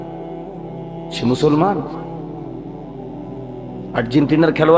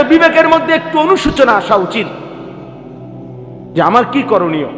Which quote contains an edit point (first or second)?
first